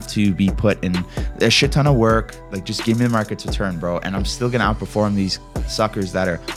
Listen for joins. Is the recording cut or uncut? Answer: cut